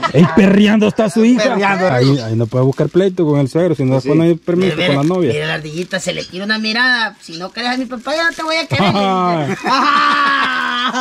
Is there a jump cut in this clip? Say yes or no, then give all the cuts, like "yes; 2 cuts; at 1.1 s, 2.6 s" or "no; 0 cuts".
yes; 1 cut; at 1.9 s